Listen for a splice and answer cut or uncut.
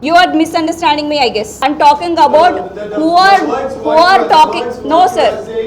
cut